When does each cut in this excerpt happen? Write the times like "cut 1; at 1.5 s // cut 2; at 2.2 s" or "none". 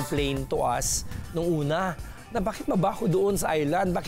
none